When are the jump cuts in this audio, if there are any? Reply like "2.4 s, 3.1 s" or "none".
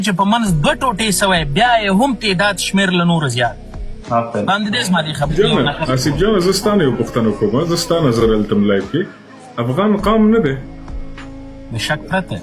5.3 s